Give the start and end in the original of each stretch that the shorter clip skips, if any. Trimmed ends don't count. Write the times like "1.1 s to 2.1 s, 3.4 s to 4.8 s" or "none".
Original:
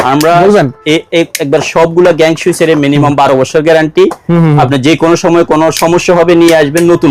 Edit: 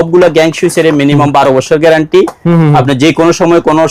none